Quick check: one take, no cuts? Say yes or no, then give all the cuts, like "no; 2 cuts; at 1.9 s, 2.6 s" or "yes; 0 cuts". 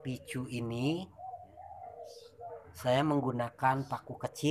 yes; 0 cuts